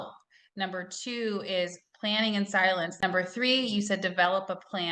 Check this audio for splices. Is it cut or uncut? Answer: cut